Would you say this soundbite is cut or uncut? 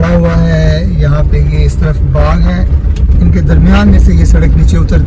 uncut